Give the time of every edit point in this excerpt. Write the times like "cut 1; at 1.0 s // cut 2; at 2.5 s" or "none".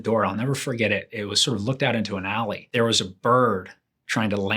cut 1; at 2.6 s

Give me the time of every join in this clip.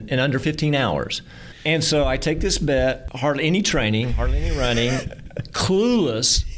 cut 1; at 1.5 s // cut 2; at 3.1 s

